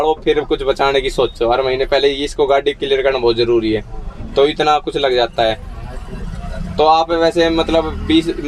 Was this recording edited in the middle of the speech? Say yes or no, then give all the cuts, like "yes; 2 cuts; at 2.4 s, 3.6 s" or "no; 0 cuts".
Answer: no; 0 cuts